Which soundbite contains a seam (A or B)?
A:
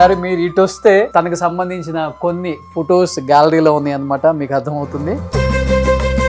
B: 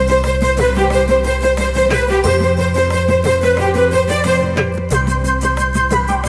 A